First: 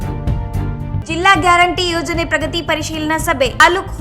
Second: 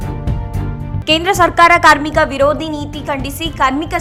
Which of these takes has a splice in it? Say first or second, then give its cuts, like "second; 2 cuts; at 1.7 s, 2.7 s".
first; 1 cut; at 1.0 s